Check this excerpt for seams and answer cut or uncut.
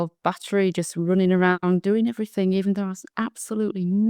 uncut